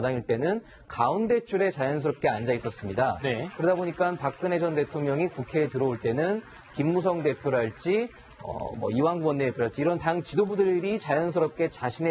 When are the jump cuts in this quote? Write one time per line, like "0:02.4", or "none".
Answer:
0:09.0